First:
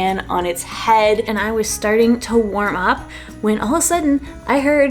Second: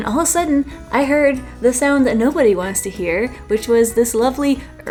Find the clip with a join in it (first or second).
first